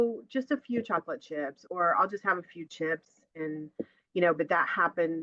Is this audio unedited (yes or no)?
yes